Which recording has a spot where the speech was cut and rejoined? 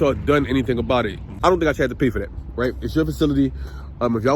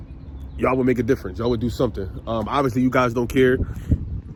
first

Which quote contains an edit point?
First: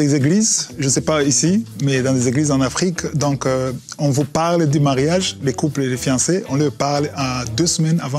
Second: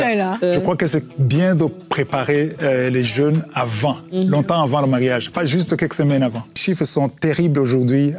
second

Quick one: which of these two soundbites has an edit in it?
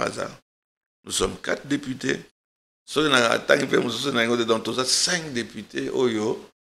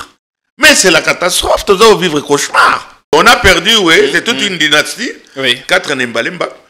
second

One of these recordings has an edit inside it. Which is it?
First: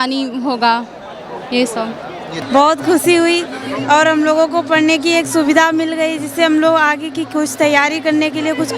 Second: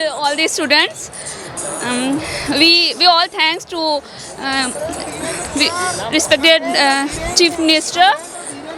first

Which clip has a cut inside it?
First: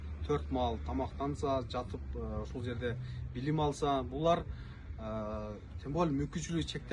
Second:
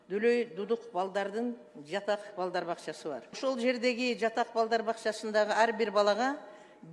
second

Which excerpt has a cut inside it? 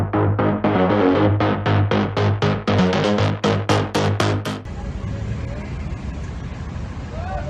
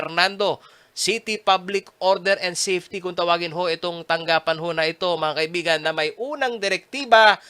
first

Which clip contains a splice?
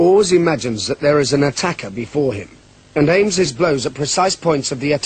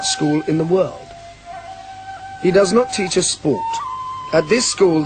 second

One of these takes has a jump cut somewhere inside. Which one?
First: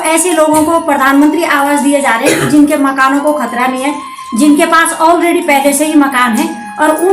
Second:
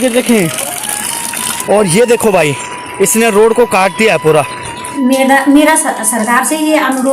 second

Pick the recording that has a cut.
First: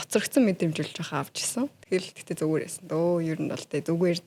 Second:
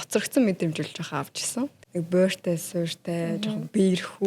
second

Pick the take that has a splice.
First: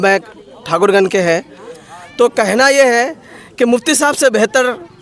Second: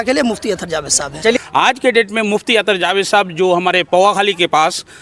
second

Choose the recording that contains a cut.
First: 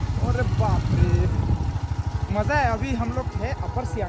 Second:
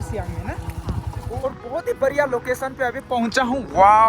second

